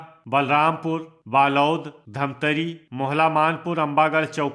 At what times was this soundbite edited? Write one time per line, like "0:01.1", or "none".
none